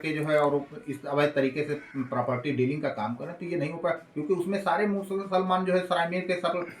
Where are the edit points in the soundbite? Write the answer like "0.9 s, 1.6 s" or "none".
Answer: none